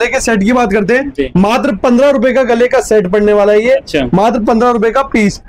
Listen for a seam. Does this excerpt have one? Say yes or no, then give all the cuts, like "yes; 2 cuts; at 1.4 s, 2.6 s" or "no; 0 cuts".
no; 0 cuts